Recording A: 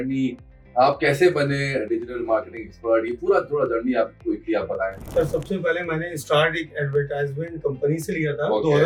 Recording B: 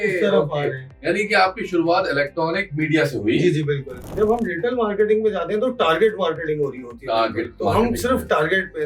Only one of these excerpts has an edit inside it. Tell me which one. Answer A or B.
B